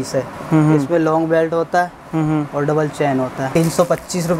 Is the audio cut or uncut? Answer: cut